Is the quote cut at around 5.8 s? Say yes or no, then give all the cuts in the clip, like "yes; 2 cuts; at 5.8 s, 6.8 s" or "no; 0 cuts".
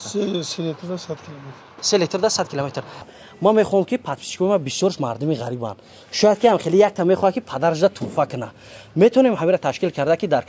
no; 1 cut; at 3.0 s